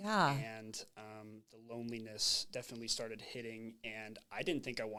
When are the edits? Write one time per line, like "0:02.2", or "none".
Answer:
none